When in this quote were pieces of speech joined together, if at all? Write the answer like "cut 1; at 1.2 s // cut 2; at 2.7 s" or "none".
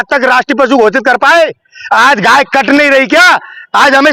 none